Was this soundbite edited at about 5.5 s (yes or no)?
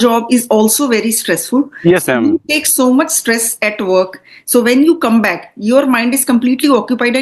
no